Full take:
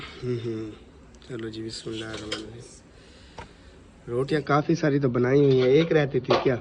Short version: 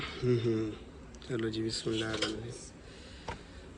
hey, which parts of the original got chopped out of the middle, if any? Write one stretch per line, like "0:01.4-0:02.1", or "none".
0:02.2-0:02.3